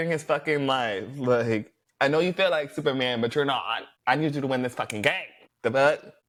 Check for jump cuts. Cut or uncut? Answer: uncut